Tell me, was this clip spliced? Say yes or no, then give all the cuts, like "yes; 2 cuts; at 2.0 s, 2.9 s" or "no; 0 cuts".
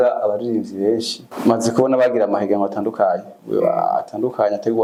no; 0 cuts